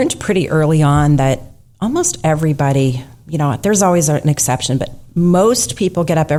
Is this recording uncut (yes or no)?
yes